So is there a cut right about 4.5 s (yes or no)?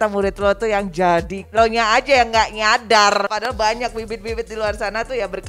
no